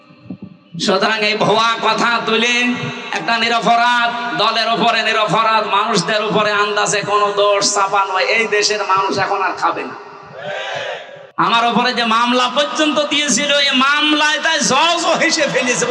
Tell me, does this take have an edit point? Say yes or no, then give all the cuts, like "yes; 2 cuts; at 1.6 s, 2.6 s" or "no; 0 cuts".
yes; 1 cut; at 11.2 s